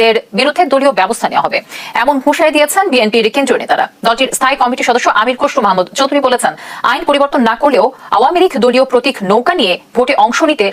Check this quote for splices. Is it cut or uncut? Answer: uncut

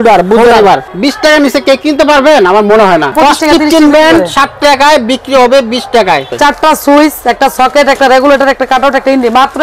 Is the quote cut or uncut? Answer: cut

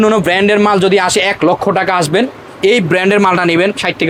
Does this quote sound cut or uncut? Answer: uncut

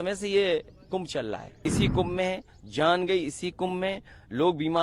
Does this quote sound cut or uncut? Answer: cut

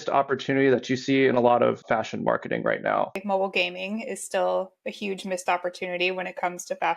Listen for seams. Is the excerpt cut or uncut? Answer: cut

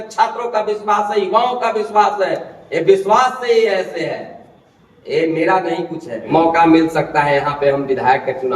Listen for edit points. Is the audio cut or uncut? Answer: cut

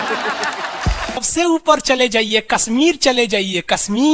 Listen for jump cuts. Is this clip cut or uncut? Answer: cut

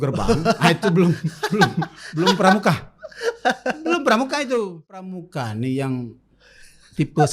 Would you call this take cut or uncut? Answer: cut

